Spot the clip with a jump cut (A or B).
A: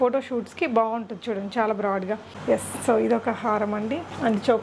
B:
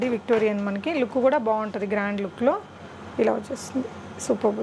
A